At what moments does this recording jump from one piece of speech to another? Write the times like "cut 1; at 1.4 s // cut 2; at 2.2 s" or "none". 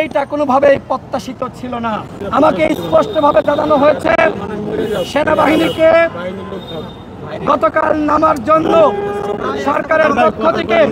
cut 1; at 2.2 s